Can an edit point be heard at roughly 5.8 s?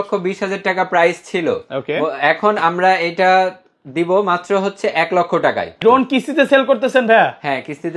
yes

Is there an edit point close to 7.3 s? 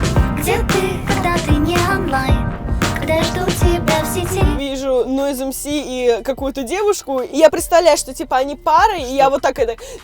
yes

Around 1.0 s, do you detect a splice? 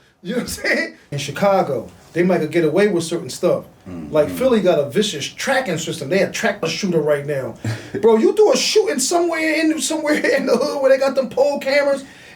yes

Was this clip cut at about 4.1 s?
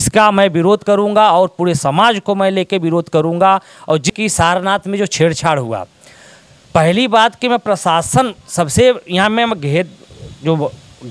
yes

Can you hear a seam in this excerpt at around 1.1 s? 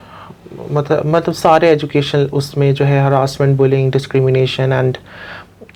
no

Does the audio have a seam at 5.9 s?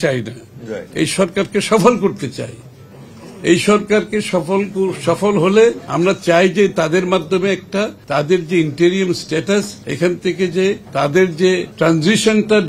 yes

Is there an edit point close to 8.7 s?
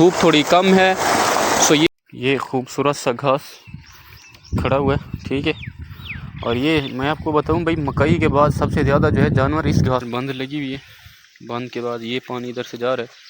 no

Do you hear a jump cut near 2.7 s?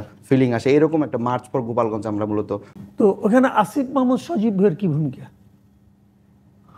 yes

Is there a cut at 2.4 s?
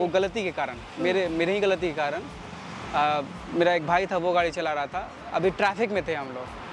no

